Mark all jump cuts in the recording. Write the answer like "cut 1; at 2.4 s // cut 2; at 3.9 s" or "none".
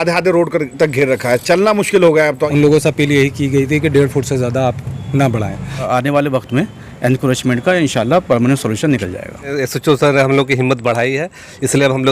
cut 1; at 2.4 s // cut 2; at 5.9 s // cut 3; at 9.5 s